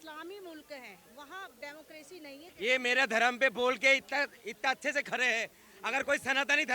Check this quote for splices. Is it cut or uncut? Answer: cut